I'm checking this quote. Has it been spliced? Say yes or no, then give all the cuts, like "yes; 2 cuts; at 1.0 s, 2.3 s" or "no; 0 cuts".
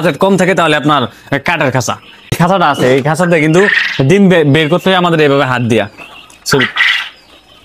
yes; 1 cut; at 2.4 s